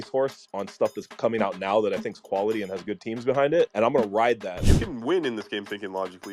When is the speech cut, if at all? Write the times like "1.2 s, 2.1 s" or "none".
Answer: 4.7 s